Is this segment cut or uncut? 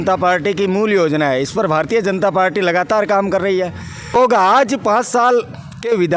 cut